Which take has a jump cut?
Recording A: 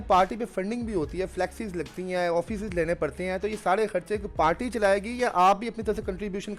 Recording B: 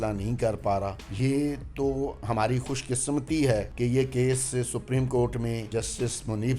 B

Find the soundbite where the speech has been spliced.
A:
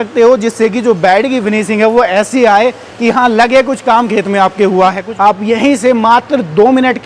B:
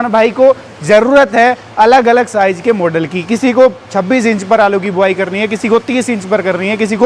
A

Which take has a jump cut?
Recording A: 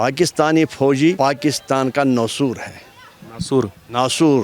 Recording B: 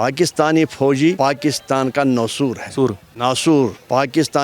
B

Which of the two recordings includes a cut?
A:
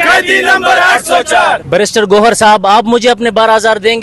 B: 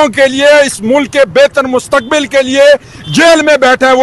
A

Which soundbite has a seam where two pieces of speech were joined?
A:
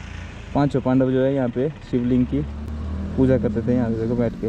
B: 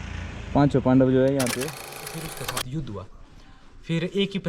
B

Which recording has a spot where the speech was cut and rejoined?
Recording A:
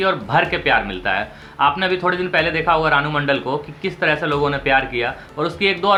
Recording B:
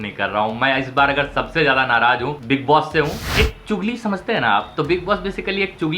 B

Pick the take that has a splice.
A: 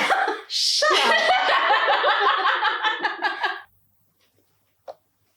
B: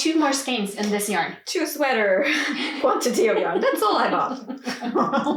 A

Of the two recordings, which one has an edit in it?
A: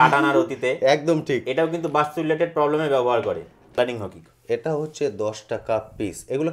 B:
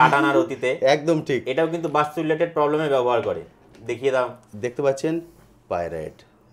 A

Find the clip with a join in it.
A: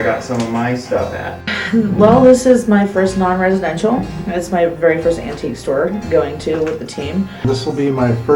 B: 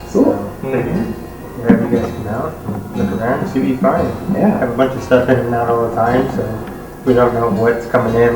A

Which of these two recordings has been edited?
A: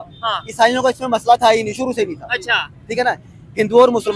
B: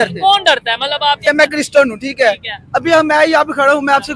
B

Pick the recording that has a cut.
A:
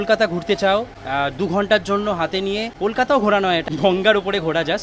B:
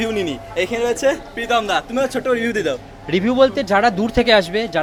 A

